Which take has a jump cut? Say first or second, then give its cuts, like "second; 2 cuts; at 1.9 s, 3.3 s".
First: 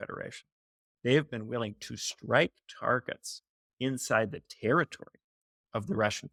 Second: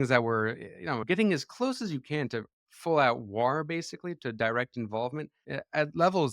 second; 2 cuts; at 1.0 s, 5.4 s